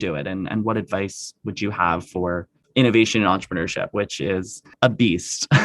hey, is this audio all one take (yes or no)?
no